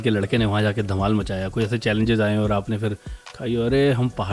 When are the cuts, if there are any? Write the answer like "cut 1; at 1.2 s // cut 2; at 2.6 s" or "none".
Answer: none